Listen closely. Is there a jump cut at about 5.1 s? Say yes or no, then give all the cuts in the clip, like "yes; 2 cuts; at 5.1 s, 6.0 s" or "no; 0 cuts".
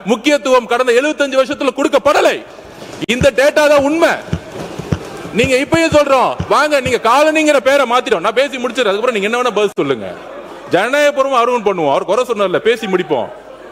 no; 0 cuts